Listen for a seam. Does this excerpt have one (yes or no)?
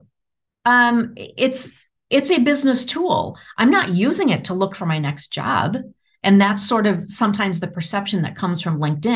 no